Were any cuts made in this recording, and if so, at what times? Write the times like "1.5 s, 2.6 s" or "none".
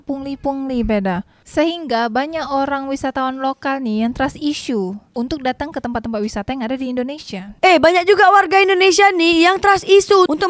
none